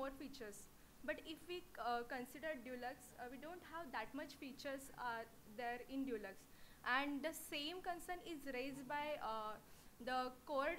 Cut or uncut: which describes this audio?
cut